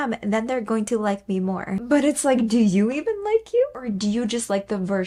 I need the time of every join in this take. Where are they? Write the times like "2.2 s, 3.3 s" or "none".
none

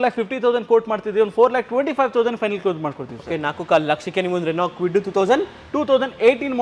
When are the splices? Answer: none

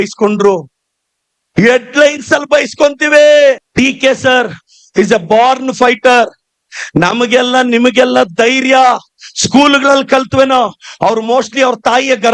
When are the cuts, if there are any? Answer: 3.7 s

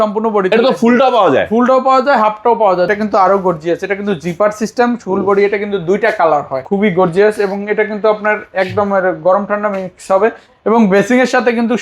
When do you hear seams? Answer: 2.9 s, 6.6 s

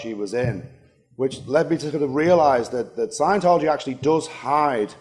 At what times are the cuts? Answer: 4.0 s

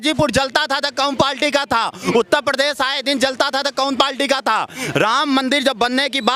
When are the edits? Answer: none

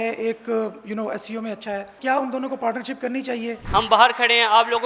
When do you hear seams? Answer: 1.9 s, 3.6 s

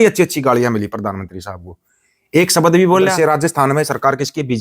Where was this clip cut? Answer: 3.1 s

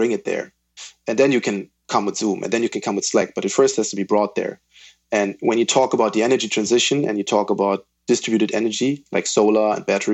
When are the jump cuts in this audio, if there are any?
1.0 s

